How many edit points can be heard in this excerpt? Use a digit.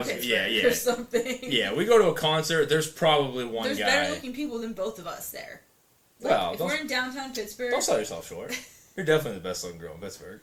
0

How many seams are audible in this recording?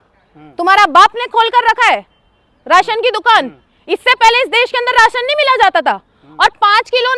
0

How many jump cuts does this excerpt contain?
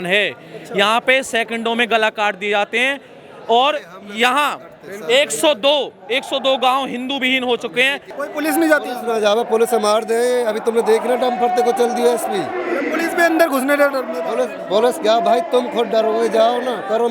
1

